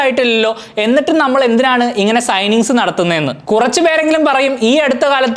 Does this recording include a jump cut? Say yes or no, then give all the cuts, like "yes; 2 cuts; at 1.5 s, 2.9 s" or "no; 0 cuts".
yes; 1 cut; at 3.4 s